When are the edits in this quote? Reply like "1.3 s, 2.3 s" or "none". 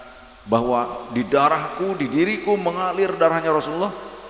none

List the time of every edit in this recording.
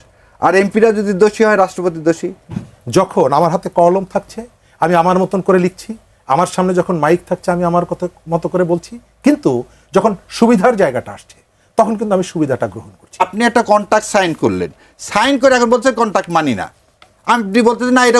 2.5 s, 13.2 s

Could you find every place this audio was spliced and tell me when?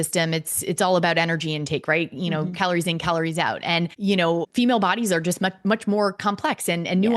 4.3 s

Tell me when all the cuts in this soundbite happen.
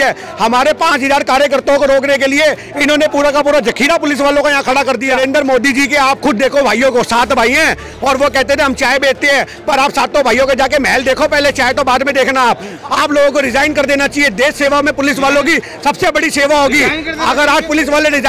5.1 s, 12.8 s

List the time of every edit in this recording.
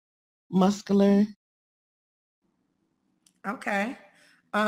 none

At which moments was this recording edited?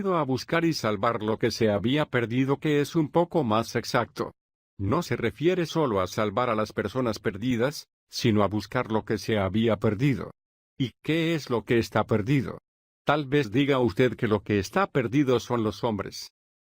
1.8 s, 3.8 s

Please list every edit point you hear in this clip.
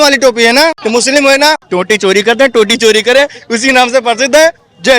0.8 s, 1.6 s

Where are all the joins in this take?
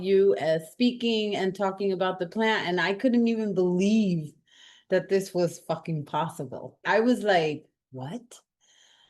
6.8 s

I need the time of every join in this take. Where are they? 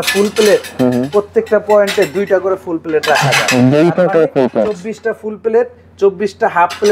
none

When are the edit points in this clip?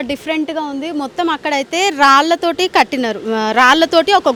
none

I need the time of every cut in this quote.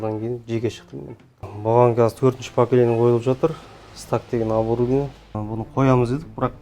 1.5 s, 5.4 s

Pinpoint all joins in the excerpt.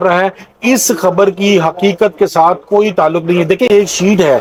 none

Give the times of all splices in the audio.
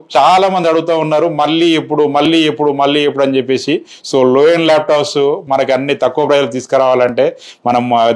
none

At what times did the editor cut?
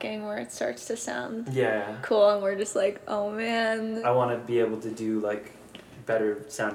4.0 s

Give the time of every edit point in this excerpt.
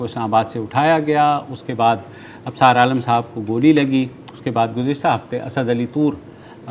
none

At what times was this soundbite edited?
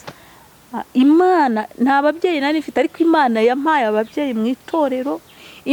none

